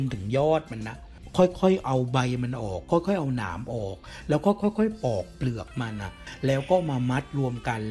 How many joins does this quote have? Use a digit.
1